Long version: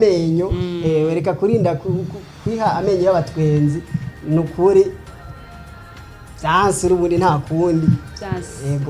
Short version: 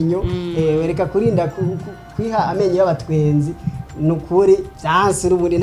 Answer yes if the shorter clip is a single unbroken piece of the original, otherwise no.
no